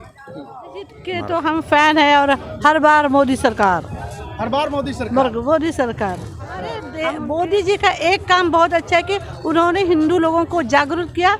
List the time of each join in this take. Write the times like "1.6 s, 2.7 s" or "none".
1.0 s, 6.9 s